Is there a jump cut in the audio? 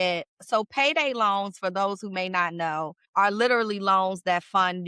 yes; 1 cut; at 3.0 s

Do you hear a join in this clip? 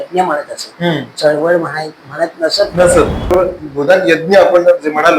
yes; 1 cut; at 3.2 s

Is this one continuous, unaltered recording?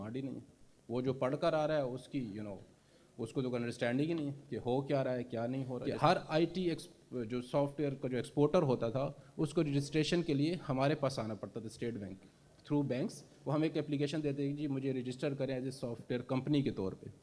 no; 1 cut; at 5.8 s

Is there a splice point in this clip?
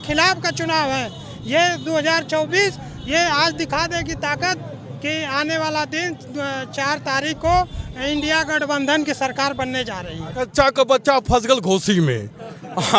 yes; 1 cut; at 10.5 s

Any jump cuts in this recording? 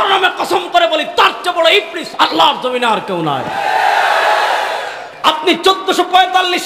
yes; 1 cut; at 5.1 s

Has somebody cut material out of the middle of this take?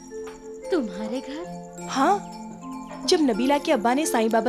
no; 0 cuts

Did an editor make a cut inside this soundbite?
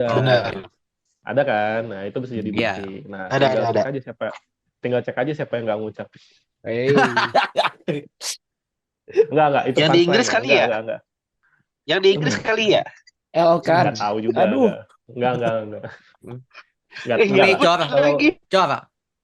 no; 0 cuts

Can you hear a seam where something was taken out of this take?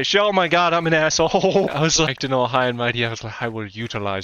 no; 0 cuts

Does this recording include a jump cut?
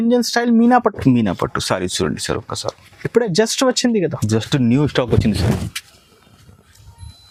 no; 0 cuts

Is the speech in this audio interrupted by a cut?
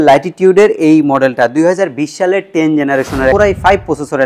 yes; 1 cut; at 3.3 s

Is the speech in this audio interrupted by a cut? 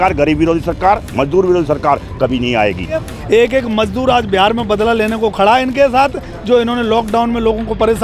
yes; 1 cut; at 3.1 s

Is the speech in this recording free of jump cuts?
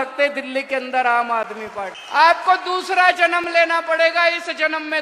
no; 1 cut; at 2.0 s

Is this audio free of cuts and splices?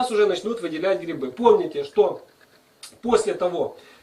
no; 1 cut; at 1.6 s

